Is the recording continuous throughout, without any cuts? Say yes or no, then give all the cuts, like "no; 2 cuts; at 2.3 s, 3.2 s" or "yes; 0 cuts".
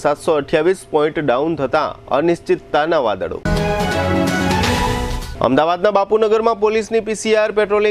yes; 0 cuts